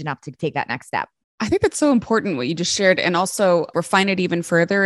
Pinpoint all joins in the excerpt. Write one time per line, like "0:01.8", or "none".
0:01.2
0:03.7